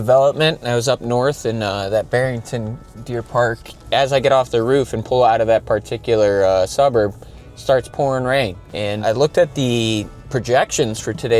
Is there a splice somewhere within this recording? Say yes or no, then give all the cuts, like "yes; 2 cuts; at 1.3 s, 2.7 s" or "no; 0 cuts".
yes; 2 cuts; at 3.9 s, 8.6 s